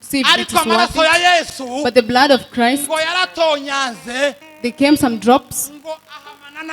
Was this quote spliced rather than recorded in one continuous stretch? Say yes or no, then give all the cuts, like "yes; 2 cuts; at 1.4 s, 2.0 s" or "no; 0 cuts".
no; 0 cuts